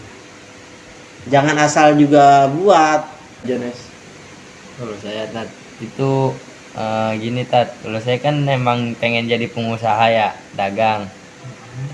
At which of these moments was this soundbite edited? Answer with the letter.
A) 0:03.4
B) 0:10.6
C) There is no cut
A